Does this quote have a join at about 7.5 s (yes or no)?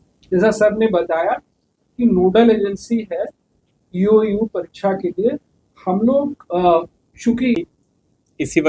yes